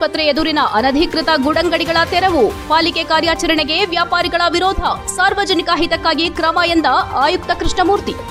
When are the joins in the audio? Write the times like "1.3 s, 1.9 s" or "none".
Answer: none